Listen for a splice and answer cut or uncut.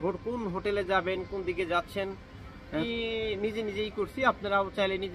cut